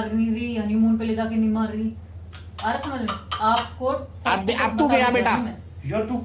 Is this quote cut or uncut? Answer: uncut